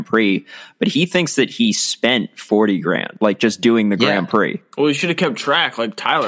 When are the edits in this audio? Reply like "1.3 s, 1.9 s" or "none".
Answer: 3.1 s, 4.6 s